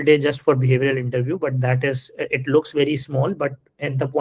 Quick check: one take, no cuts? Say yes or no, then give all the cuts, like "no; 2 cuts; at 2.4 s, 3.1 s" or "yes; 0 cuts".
yes; 0 cuts